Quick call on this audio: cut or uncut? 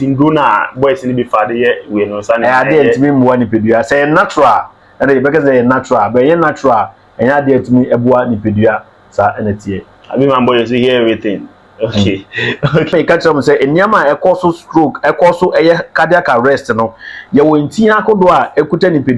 cut